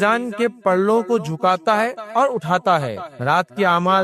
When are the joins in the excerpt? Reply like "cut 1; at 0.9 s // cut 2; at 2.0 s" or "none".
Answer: cut 1; at 3.1 s